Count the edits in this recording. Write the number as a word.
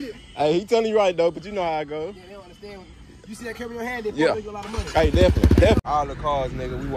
one